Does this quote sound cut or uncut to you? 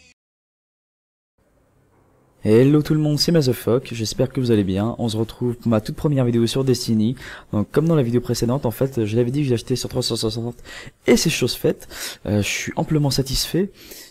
cut